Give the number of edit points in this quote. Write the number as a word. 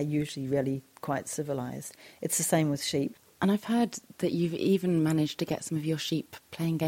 one